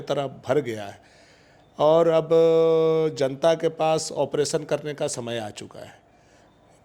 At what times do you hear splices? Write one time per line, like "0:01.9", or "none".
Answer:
none